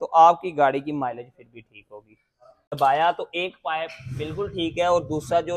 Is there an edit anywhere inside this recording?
yes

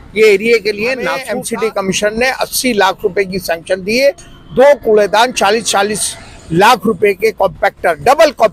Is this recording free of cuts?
no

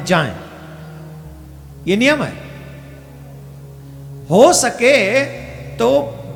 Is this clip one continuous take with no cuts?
yes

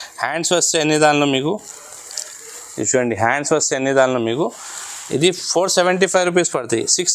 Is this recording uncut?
yes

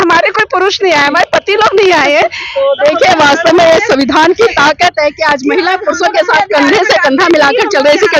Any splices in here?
no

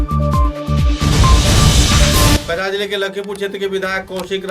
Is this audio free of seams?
no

